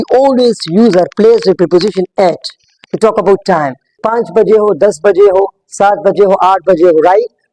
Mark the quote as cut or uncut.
cut